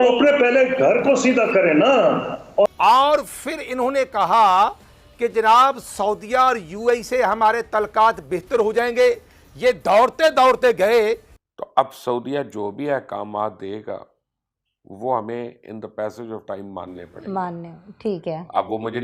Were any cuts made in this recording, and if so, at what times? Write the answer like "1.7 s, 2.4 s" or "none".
2.7 s, 11.3 s